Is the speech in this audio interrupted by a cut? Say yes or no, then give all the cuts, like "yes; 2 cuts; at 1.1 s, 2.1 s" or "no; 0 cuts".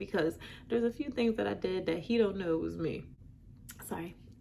yes; 1 cut; at 3.2 s